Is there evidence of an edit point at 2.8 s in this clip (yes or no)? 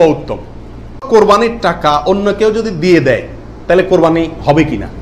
no